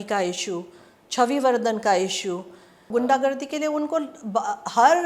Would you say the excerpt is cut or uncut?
cut